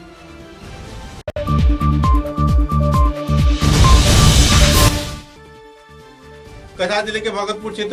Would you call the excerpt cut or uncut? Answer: uncut